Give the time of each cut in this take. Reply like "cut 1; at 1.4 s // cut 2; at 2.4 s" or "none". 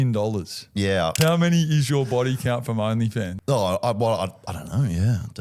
cut 1; at 1.1 s // cut 2; at 3.4 s